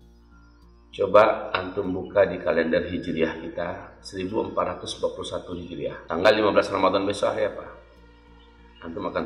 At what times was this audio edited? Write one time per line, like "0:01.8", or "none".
0:06.0